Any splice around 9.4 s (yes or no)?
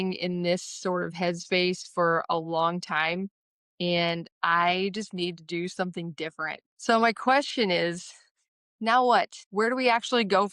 yes